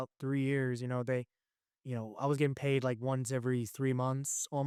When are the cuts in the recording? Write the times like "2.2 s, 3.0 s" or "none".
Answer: none